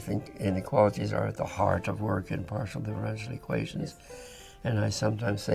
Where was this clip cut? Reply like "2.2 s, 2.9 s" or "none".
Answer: none